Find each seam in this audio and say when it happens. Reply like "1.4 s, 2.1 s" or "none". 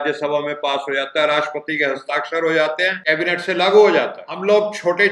3.0 s, 4.2 s